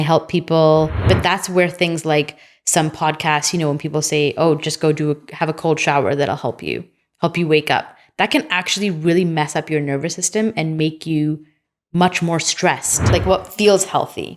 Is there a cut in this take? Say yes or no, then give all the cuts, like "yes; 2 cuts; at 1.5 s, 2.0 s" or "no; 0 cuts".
yes; 2 cuts; at 1.0 s, 13.1 s